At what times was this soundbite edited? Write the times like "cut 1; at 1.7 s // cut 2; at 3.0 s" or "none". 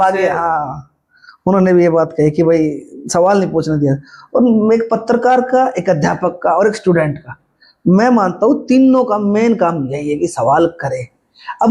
none

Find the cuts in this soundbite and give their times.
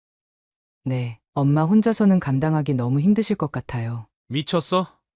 none

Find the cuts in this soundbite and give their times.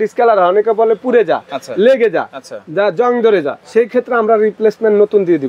cut 1; at 3.6 s

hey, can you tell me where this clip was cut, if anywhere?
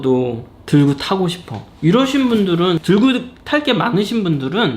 cut 1; at 2.8 s

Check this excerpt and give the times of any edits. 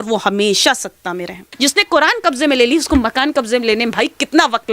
cut 1; at 1.5 s

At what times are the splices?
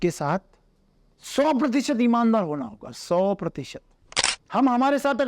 cut 1; at 4.4 s

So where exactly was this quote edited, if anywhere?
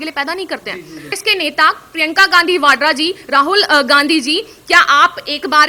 cut 1; at 1.1 s

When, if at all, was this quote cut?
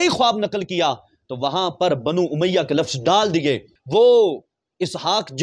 cut 1; at 3.7 s

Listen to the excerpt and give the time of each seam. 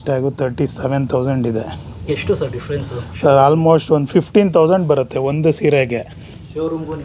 cut 1; at 1.9 s

